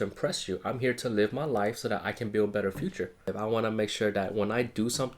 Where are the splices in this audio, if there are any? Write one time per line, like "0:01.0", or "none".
0:03.3